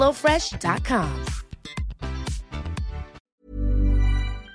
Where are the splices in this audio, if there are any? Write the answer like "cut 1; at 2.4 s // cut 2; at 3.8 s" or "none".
cut 1; at 3.4 s